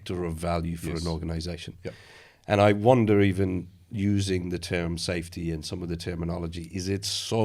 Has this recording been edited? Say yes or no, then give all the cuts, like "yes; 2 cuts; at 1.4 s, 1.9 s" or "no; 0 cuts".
no; 0 cuts